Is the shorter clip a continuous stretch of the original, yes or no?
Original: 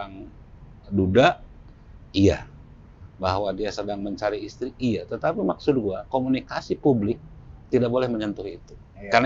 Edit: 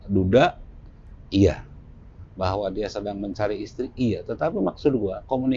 yes